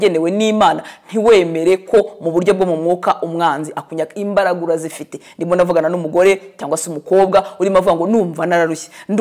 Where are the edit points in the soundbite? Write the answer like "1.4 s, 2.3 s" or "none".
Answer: none